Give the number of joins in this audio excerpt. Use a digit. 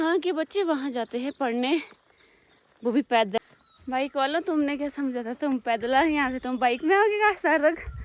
1